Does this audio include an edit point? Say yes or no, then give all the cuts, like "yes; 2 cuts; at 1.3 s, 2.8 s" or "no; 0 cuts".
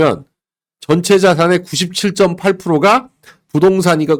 no; 0 cuts